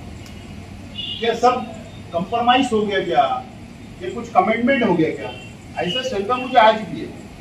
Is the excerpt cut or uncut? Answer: uncut